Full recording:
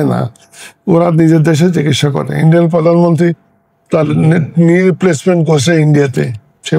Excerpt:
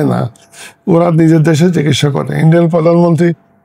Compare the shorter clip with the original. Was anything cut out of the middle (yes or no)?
no